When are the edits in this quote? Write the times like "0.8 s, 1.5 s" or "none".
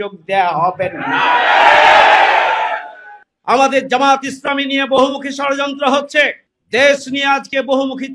3.2 s